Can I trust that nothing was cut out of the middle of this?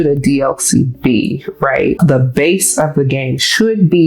no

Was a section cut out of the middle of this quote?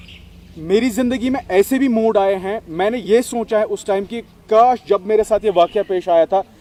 no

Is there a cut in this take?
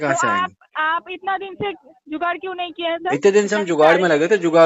no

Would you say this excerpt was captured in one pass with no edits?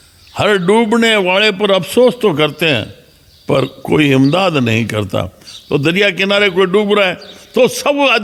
yes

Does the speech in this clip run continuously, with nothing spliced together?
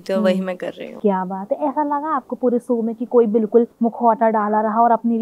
yes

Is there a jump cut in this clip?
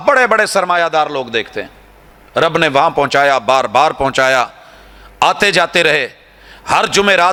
no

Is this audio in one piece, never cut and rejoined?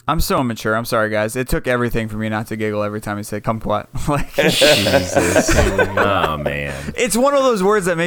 yes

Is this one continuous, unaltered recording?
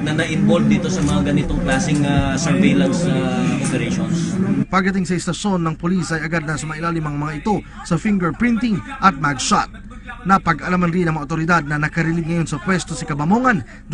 yes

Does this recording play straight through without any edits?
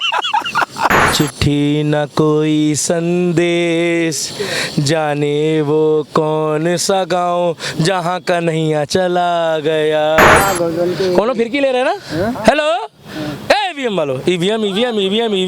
no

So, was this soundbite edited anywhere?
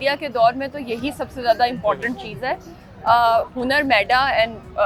no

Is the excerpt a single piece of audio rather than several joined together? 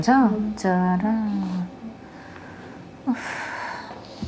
yes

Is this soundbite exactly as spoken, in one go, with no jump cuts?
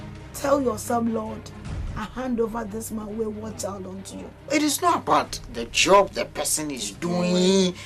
no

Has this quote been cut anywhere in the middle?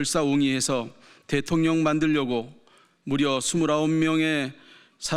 no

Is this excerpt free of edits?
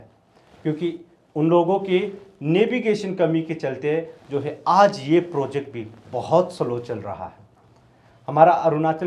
yes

